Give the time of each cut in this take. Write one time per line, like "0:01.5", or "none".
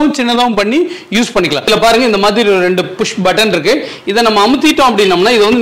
0:01.7